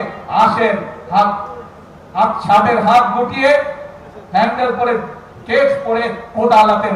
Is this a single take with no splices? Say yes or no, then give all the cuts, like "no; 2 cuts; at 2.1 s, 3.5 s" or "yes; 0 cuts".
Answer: yes; 0 cuts